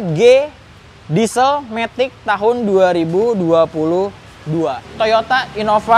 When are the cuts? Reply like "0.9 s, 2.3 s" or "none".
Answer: 4.8 s